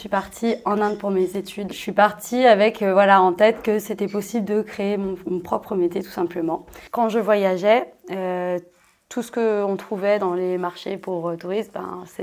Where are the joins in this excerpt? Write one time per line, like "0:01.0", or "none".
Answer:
0:01.6
0:06.7